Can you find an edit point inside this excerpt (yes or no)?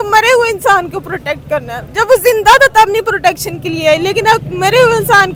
no